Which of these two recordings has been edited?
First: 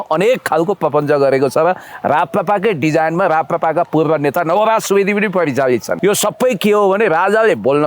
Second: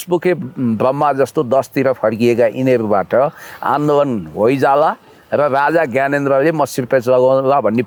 first; 1 cut; at 5.9 s

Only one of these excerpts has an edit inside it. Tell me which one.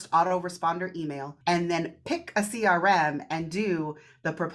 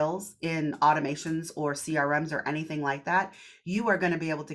first; 1 cut; at 1.3 s

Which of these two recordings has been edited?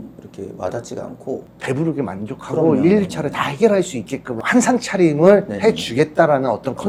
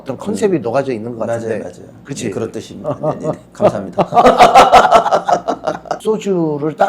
second; 1 cut; at 5.9 s

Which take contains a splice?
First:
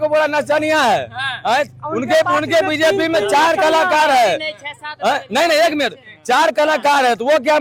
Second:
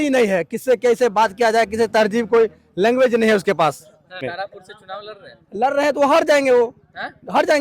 second; 1 cut; at 4.2 s

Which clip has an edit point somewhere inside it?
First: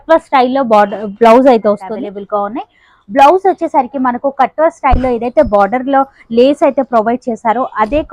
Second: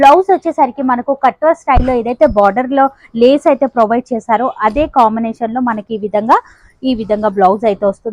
first; 1 cut; at 1.9 s

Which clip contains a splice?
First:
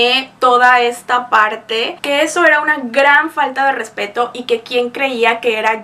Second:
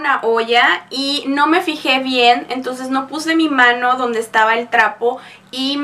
first; 1 cut; at 1.9 s

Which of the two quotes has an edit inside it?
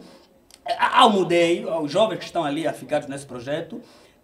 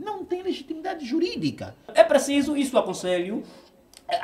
second; 1 cut; at 1.9 s

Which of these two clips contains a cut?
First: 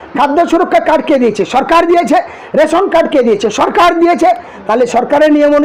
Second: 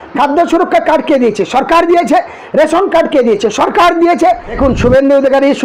second; 1 cut; at 4.5 s

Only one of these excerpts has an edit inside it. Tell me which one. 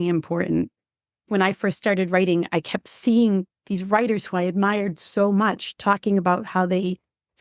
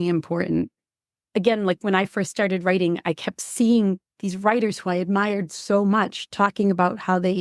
first; 1 cut; at 1.3 s

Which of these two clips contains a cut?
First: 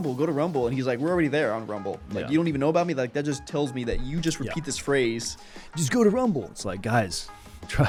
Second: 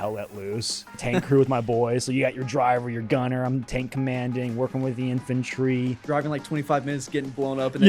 second; 2 cuts; at 1.0 s, 6.0 s

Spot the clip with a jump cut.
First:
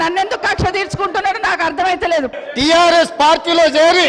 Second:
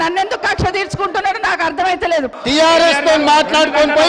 first; 1 cut; at 2.4 s

